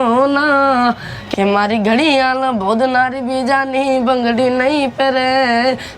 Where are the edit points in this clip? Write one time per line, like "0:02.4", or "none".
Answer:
0:01.1